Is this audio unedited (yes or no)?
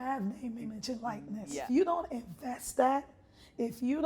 no